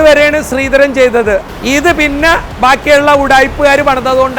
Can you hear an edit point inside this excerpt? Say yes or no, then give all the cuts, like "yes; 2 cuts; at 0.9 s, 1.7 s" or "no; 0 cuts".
yes; 1 cut; at 1.5 s